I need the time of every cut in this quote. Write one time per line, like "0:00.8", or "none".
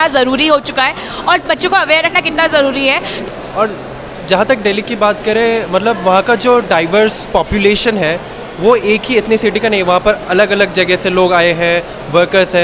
none